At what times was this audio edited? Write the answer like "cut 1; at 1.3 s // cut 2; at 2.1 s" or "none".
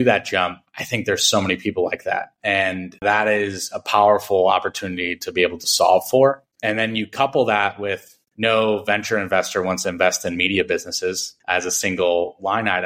none